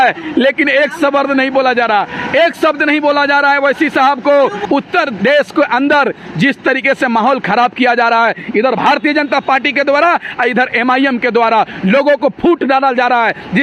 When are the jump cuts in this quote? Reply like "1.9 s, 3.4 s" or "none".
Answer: 4.6 s